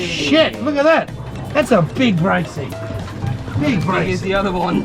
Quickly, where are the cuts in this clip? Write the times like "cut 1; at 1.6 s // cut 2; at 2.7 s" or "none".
none